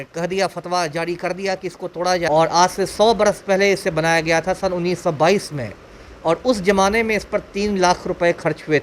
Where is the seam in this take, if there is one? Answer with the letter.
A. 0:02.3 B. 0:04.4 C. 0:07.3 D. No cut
A